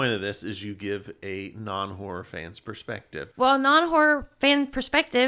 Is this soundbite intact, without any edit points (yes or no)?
no